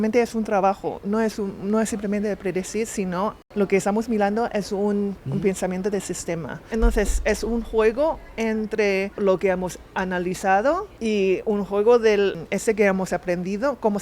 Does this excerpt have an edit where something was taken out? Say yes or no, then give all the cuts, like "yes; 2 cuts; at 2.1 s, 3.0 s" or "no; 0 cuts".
yes; 6 cuts; at 3.4 s, 5.2 s, 6.6 s, 9.2 s, 10.9 s, 12.4 s